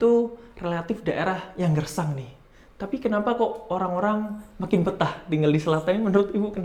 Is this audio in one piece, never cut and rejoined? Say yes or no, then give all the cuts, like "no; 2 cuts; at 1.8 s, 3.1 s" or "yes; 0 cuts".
yes; 0 cuts